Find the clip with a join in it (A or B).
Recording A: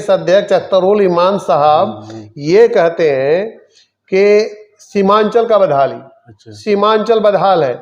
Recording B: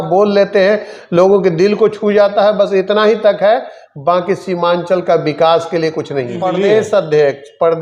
B